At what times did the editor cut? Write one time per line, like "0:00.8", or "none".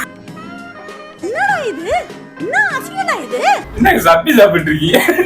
0:03.7